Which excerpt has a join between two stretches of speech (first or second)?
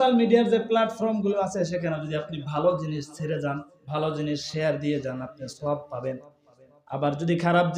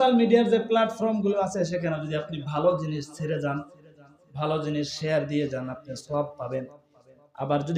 first